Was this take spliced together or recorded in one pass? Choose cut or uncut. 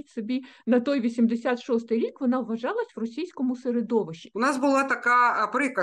cut